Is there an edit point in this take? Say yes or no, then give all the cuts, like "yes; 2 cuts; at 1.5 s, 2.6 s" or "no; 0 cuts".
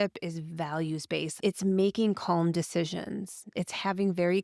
yes; 1 cut; at 1.3 s